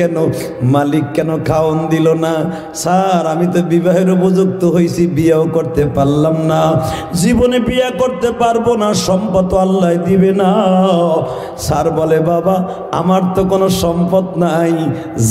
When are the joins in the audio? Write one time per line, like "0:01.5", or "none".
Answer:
none